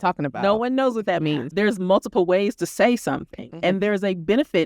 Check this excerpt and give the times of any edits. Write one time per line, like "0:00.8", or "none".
0:01.5